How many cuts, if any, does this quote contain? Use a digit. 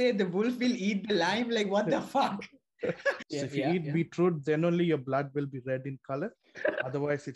1